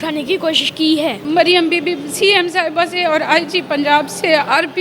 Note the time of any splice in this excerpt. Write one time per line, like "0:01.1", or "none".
0:01.2